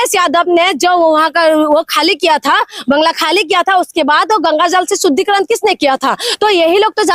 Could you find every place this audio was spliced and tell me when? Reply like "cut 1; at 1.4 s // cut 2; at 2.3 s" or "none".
none